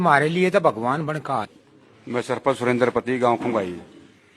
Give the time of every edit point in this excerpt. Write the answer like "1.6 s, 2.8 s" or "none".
1.4 s